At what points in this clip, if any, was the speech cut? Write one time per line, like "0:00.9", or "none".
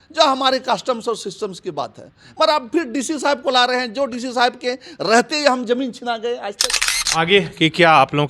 0:07.1